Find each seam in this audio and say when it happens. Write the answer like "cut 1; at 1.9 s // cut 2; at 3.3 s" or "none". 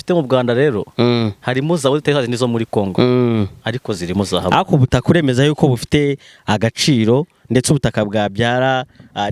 none